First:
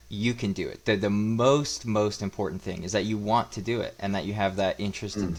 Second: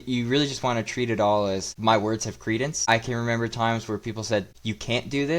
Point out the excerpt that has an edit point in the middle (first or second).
second